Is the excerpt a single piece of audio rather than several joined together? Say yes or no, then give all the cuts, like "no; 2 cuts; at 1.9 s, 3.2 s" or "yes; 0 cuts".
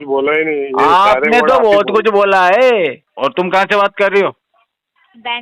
no; 1 cut; at 3.0 s